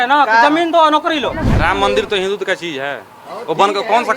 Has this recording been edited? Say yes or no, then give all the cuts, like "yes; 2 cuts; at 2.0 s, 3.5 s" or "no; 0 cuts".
yes; 1 cut; at 1.5 s